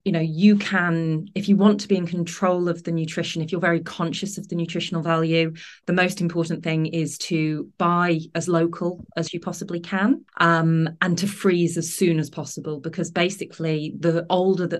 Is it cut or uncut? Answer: uncut